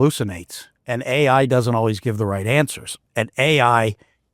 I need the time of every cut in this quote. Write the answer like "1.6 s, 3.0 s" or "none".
none